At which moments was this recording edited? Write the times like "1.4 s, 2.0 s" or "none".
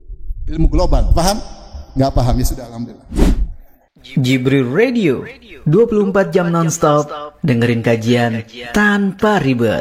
3.0 s